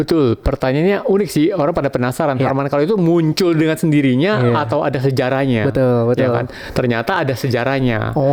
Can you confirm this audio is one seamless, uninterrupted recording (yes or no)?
yes